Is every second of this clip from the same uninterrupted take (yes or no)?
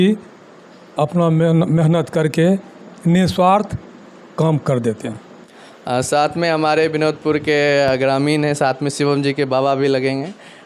yes